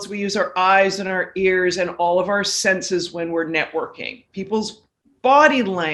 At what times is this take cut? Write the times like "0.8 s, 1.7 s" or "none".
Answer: none